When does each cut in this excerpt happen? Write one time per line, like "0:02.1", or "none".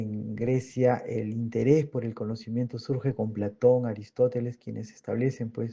0:04.6